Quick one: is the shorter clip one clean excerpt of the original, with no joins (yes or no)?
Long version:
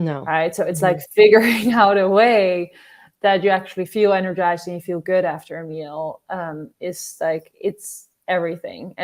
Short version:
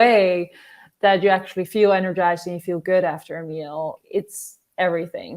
no